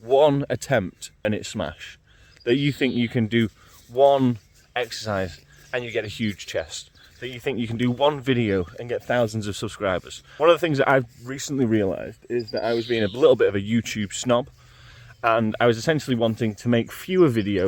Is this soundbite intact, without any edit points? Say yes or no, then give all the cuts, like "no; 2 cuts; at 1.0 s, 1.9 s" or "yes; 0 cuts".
no; 2 cuts; at 1.2 s, 10.2 s